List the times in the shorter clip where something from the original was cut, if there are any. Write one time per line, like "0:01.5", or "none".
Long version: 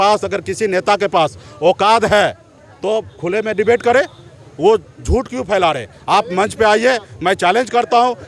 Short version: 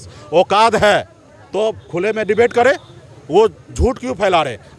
none